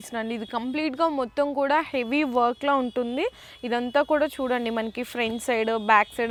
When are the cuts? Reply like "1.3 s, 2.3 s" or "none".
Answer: none